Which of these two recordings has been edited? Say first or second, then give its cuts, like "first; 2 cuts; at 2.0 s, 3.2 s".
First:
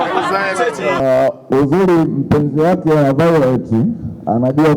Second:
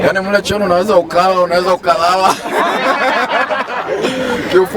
first; 1 cut; at 1.0 s